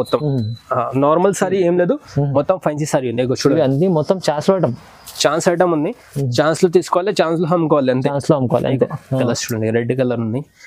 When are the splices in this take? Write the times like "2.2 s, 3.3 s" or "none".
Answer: 9.3 s